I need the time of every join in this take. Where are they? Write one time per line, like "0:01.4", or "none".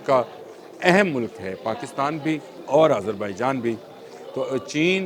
0:02.5